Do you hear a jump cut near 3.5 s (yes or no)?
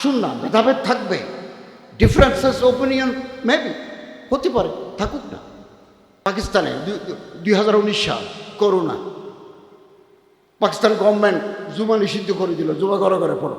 no